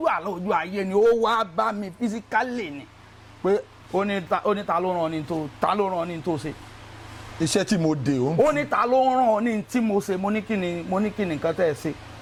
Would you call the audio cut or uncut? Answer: uncut